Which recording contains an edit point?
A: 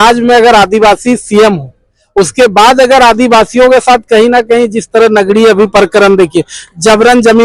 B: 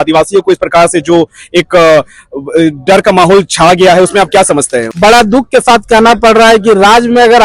B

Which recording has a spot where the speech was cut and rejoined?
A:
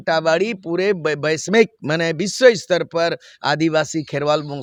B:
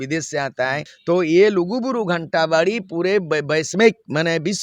B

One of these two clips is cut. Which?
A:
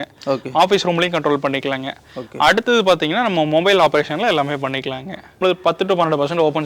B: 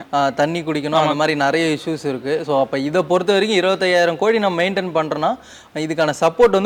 A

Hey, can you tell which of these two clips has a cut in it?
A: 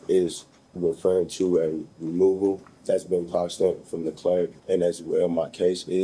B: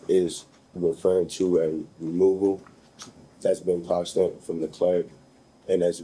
A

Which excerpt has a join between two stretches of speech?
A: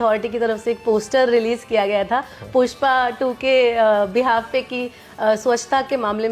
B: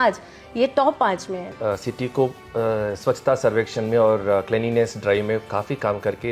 B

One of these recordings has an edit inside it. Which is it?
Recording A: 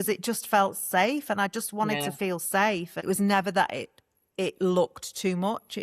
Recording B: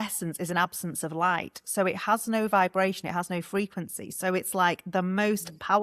A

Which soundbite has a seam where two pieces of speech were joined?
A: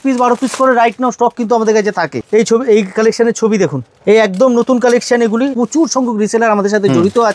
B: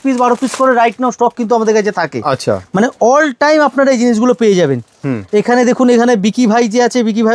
A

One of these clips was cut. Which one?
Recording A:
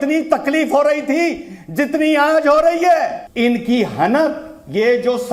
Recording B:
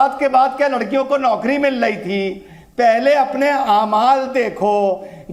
A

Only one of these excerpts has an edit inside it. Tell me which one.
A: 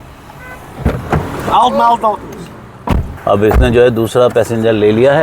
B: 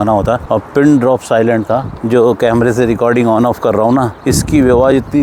A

